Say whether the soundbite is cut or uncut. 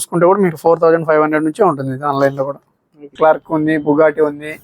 cut